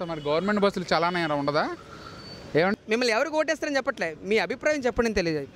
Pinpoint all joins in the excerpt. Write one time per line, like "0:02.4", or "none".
0:02.7